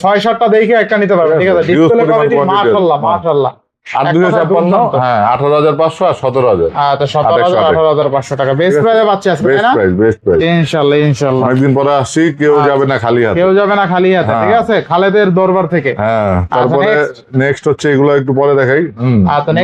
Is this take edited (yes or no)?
no